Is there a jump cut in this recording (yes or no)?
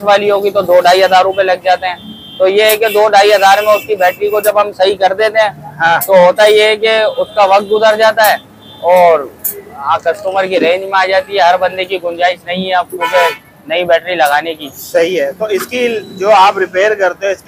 no